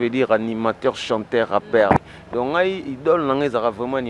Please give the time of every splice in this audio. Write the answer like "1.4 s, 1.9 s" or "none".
2.0 s

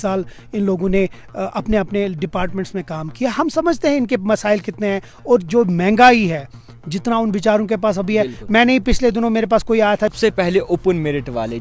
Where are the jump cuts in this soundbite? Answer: 10.1 s

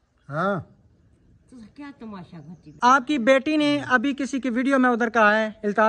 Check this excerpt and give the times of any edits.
2.7 s

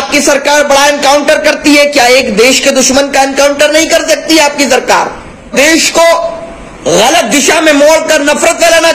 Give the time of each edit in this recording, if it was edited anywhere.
5.5 s

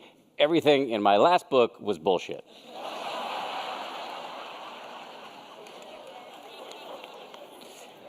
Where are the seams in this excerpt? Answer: 4.5 s

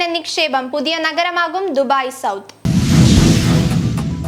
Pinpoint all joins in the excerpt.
2.6 s

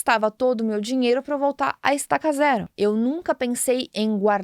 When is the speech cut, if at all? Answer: 2.7 s

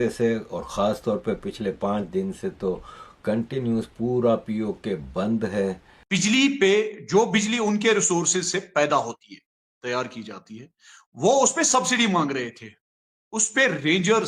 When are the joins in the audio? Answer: 5.9 s

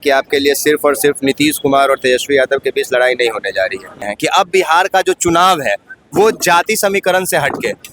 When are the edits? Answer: 4.1 s

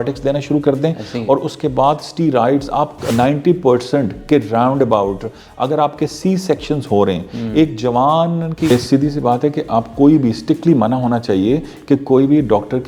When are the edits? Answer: 3.1 s, 8.7 s

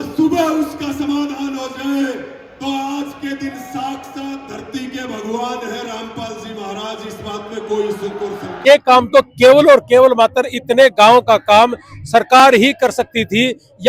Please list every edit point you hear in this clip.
8.6 s

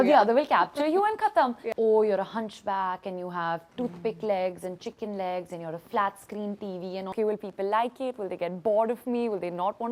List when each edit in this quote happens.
1.6 s, 7.1 s

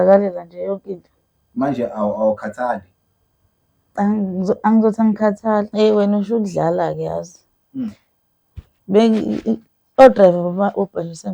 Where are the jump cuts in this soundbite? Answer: 5.7 s

